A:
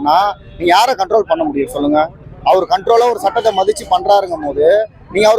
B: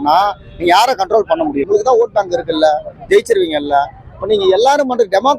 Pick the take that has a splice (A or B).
B